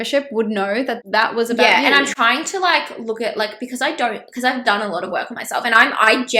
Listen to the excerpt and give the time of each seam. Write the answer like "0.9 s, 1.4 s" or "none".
1.0 s